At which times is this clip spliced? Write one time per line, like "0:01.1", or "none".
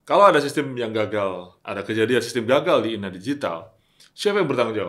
0:01.5